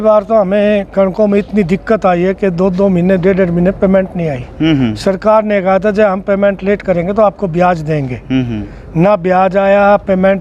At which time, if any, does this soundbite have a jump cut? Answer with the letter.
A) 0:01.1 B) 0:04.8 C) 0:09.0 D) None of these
D